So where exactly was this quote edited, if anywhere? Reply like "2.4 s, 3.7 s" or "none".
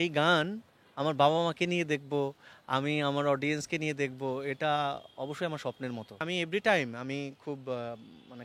6.1 s